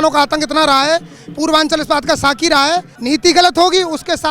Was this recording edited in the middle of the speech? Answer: yes; 1 cut; at 2.9 s

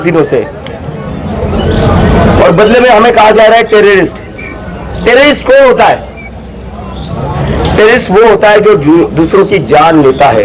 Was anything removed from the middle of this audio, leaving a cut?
no; 0 cuts

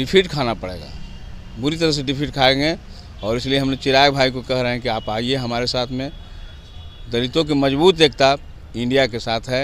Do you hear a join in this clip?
no; 0 cuts

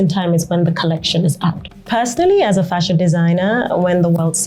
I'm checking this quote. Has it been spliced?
yes; 1 cut; at 1.6 s

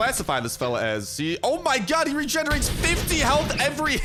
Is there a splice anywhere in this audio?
no; 0 cuts

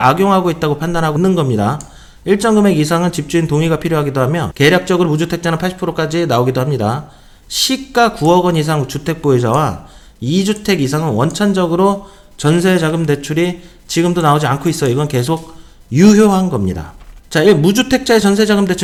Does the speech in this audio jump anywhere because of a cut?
no; 0 cuts

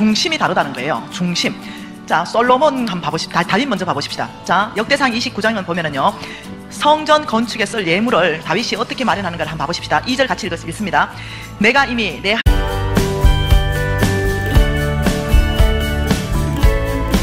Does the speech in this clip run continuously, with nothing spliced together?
yes; 0 cuts

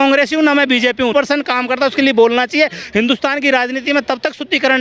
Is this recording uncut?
no; 1 cut; at 1.1 s

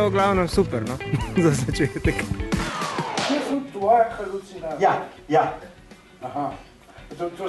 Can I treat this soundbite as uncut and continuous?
no; 1 cut; at 2.7 s

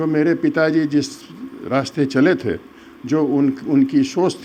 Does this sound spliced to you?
no; 0 cuts

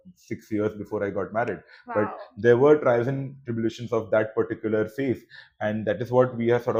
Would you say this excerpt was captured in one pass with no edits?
yes; 0 cuts

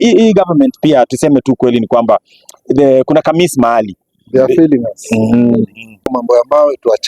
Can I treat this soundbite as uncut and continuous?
no; 1 cut; at 6.1 s

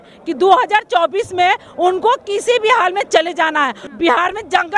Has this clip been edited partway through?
yes; 1 cut; at 3.8 s

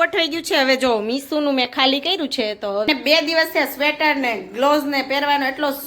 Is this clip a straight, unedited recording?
no; 1 cut; at 2.9 s

